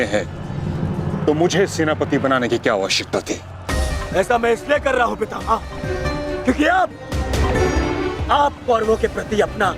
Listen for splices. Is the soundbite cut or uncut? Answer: uncut